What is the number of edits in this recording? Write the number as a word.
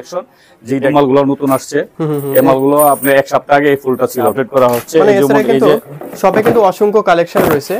two